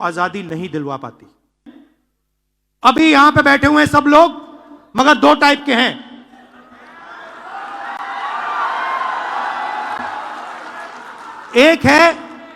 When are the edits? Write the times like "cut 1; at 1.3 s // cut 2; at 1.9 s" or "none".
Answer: cut 1; at 1.7 s